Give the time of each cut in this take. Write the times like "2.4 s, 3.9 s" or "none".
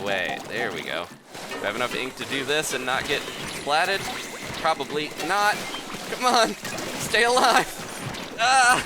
1.2 s